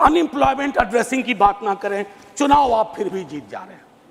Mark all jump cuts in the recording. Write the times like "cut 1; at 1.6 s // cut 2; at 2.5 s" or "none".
none